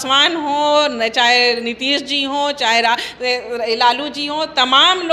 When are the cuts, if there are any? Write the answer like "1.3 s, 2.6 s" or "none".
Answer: none

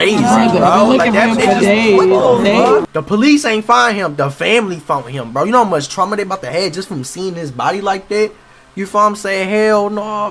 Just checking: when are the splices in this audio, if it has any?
2.8 s

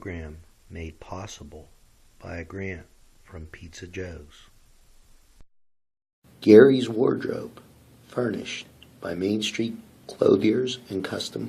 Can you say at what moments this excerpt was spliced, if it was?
5.5 s

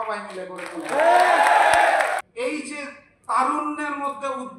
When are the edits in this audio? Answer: 2.2 s

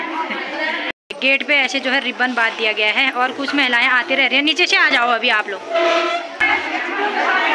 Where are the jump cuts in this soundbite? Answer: 1.0 s, 6.5 s

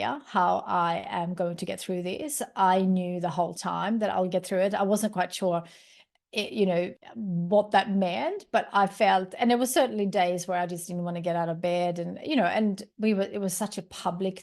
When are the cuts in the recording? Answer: 7.0 s

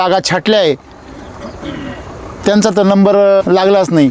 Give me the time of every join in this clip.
2.4 s, 3.4 s

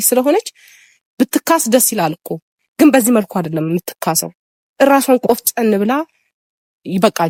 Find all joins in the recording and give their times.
none

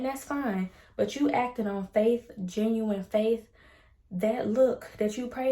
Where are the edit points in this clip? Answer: none

